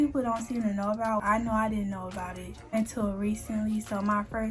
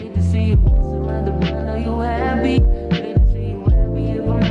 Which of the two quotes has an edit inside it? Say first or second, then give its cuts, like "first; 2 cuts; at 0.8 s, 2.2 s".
first; 2 cuts; at 1.2 s, 2.5 s